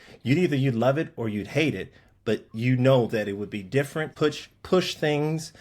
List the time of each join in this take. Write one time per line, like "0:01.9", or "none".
0:04.1